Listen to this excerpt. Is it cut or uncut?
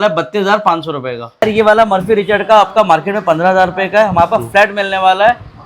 cut